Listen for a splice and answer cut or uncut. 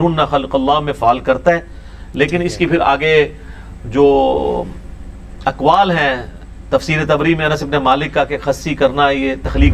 uncut